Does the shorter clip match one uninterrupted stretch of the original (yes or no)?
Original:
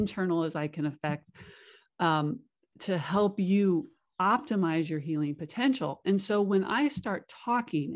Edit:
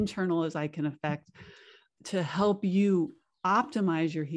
no